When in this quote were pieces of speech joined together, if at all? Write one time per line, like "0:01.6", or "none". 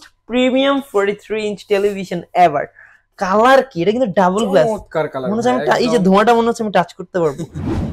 none

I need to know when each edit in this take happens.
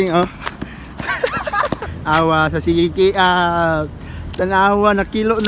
0:02.0

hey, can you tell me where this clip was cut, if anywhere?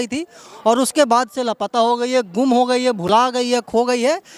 none

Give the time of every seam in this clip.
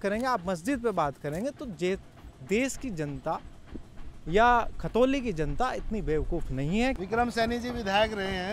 0:07.0

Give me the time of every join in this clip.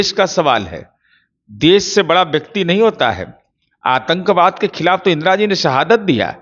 none

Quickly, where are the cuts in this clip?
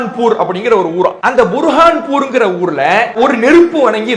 0:01.2
0:03.1

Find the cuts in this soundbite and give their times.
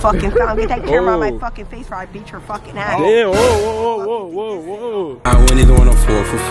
0:05.1

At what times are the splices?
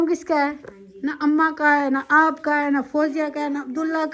none

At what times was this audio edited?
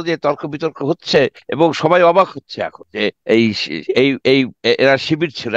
0:01.4
0:03.0

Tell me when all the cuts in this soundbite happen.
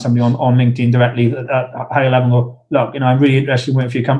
0:01.5

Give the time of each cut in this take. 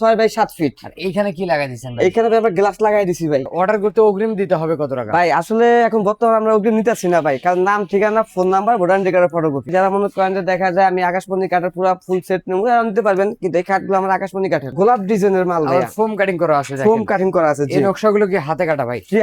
0:03.5
0:09.7
0:14.7

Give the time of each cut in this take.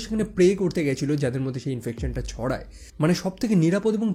0:02.9

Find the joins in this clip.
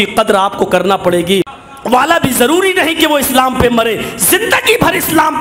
0:01.5

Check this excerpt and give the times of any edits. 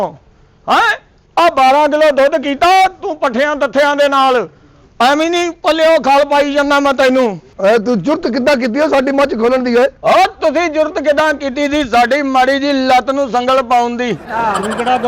0:07.5

